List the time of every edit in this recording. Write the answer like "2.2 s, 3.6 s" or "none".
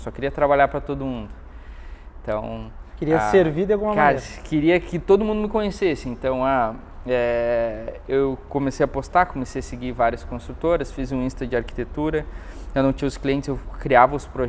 none